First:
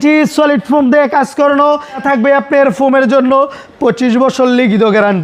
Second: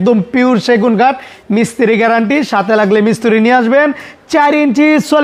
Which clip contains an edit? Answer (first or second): first